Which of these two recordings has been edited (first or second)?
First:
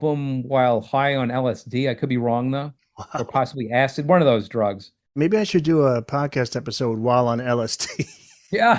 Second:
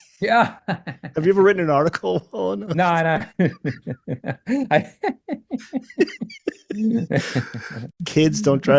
first